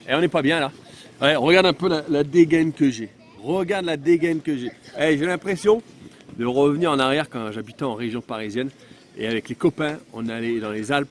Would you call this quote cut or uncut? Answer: uncut